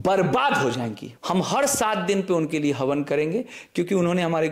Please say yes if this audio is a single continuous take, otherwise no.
no